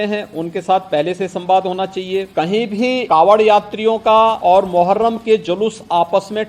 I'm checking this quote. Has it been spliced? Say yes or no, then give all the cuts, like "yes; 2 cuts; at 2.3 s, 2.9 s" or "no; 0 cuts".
yes; 3 cuts; at 2.3 s, 3.0 s, 4.4 s